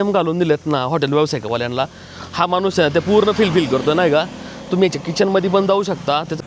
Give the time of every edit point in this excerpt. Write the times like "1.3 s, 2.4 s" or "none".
none